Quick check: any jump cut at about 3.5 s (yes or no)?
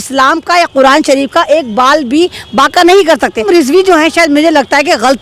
yes